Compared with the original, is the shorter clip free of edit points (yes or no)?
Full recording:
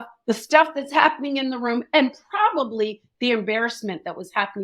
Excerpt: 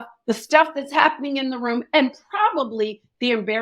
yes